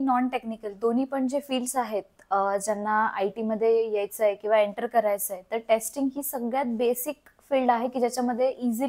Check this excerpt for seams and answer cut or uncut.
uncut